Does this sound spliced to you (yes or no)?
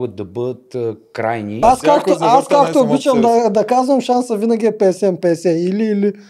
yes